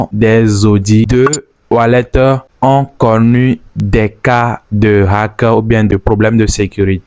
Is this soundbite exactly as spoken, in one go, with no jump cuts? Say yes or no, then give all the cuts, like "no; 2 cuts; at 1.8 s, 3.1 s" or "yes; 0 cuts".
no; 1 cut; at 1.1 s